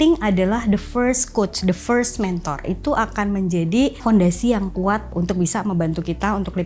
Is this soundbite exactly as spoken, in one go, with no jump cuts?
no; 3 cuts; at 2.7 s, 4.0 s, 5.1 s

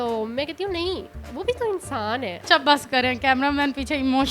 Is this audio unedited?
no; 1 cut; at 2.4 s

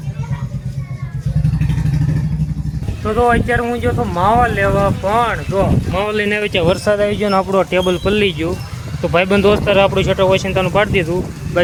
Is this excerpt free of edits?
yes; 0 cuts

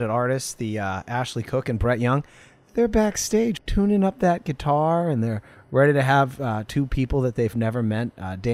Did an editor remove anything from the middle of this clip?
yes; 1 cut; at 3.6 s

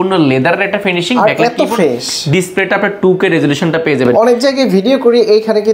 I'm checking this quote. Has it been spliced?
no; 0 cuts

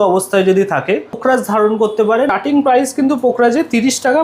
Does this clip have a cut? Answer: yes; 2 cuts; at 1.2 s, 2.3 s

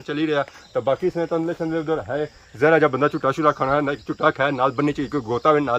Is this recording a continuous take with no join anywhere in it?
yes; 0 cuts

